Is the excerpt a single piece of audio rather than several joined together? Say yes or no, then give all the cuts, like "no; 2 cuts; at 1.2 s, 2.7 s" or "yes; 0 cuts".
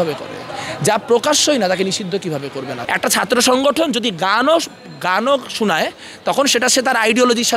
no; 1 cut; at 2.8 s